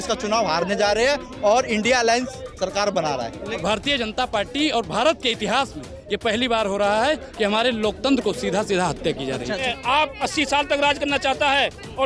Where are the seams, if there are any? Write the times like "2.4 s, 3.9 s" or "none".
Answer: 3.6 s, 9.7 s

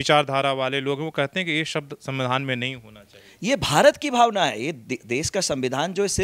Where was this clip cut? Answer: none

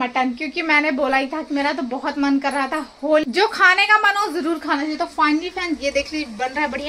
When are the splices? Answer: 3.2 s

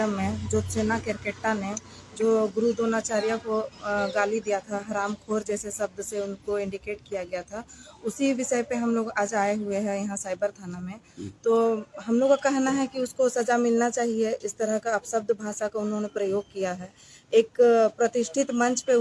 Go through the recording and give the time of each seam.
none

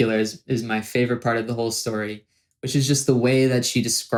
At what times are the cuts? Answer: none

